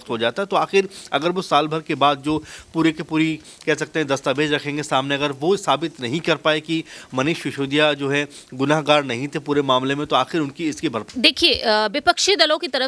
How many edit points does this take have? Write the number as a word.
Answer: one